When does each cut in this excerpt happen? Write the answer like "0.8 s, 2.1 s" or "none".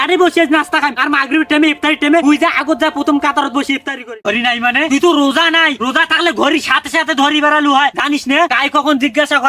4.1 s